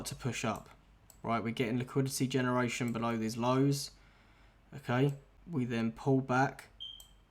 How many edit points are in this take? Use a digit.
1